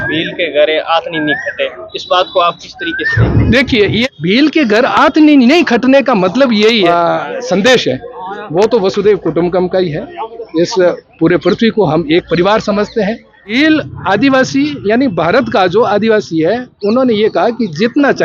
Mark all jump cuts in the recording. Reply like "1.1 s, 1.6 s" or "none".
4.0 s, 6.9 s, 13.5 s